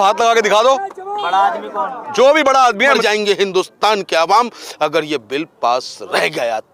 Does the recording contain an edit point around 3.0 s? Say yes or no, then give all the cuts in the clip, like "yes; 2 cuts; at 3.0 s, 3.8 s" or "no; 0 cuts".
yes; 1 cut; at 3.0 s